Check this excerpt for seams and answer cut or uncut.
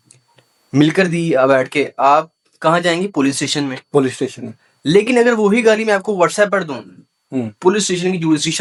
uncut